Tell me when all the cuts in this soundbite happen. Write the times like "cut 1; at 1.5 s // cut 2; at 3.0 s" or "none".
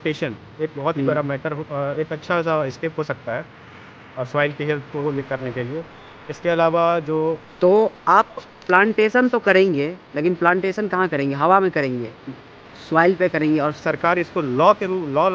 cut 1; at 7.5 s // cut 2; at 13.9 s